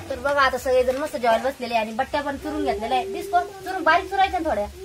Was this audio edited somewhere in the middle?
no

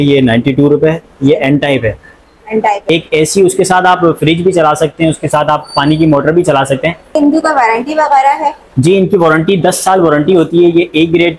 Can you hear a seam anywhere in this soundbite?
yes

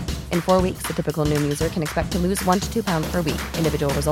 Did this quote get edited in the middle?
no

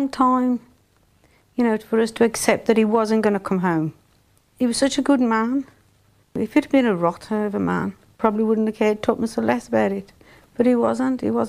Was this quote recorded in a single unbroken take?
no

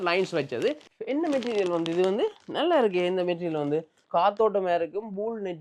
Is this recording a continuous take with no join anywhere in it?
no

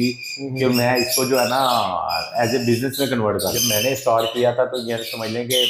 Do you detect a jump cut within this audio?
yes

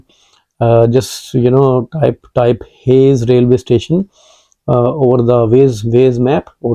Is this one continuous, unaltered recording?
yes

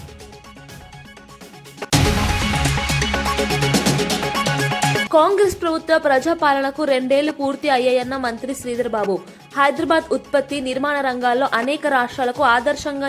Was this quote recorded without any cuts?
no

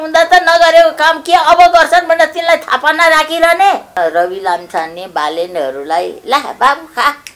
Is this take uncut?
no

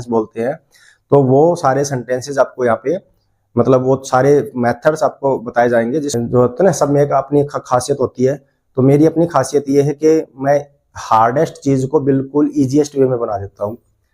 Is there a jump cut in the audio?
yes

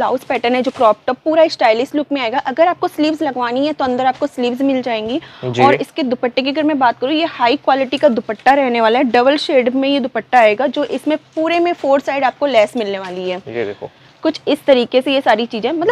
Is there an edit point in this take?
no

